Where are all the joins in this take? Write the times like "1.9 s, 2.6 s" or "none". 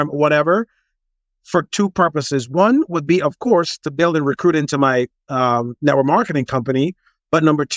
none